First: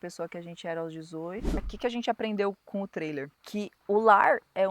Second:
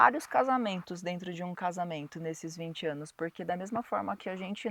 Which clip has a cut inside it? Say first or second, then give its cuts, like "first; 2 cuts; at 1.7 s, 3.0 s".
first; 2 cuts; at 1.6 s, 3.8 s